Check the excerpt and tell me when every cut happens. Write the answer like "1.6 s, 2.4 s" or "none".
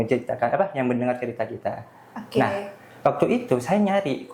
none